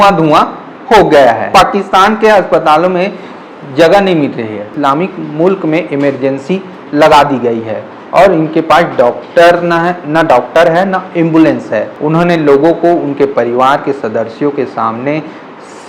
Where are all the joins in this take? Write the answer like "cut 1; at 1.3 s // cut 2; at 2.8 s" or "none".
cut 1; at 1.5 s // cut 2; at 4.7 s // cut 3; at 11.9 s